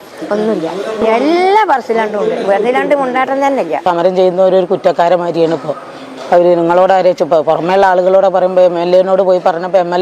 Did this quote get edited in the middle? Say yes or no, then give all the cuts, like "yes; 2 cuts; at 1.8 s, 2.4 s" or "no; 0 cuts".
yes; 1 cut; at 3.8 s